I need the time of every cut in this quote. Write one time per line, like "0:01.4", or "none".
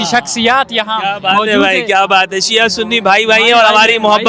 none